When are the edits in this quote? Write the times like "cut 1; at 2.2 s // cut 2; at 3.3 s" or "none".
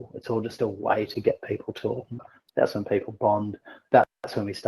cut 1; at 2.4 s